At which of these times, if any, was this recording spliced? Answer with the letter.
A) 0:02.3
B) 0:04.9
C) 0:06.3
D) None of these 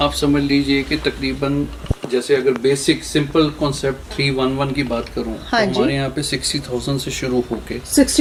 D